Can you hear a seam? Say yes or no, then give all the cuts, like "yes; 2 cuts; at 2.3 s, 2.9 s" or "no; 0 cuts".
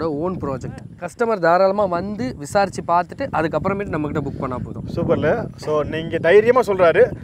yes; 1 cut; at 1.0 s